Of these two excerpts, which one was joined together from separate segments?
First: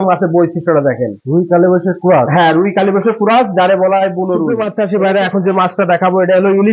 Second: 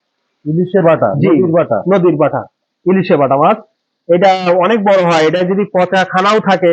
first; 1 cut; at 4.5 s

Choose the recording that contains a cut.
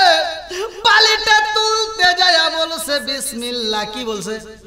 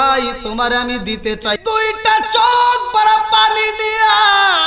second; 1 cut; at 1.6 s

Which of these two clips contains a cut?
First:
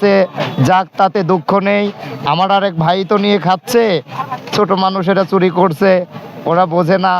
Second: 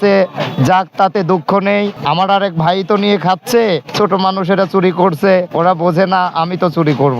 second; 3 cuts; at 2.0 s, 3.9 s, 5.5 s

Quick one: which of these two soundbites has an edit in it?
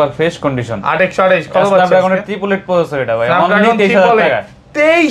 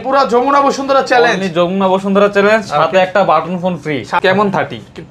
second; 1 cut; at 4.2 s

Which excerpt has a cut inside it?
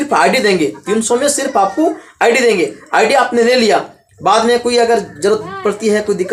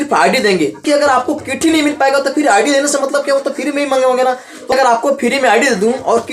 second; 2 cuts; at 0.8 s, 4.6 s

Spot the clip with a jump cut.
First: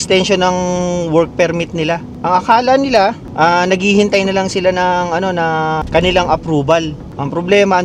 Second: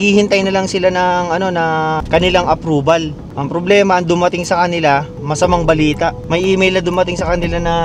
first; 1 cut; at 2.1 s

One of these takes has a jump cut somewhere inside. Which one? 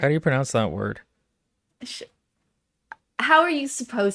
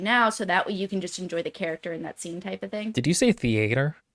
second; 1 cut; at 2.9 s

